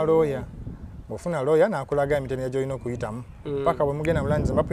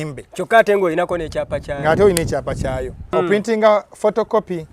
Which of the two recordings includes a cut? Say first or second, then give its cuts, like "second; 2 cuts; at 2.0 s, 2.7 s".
second; 1 cut; at 3.2 s